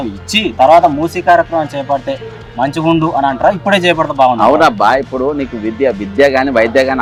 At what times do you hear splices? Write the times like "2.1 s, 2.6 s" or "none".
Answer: none